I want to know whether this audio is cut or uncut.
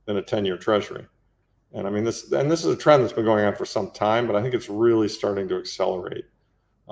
uncut